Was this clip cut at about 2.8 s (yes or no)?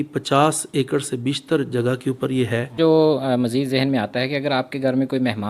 yes